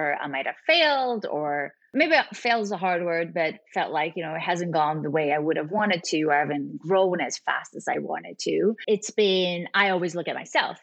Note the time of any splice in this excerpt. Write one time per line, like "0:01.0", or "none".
0:01.8